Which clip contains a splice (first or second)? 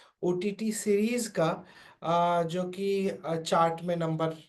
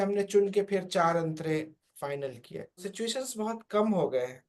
second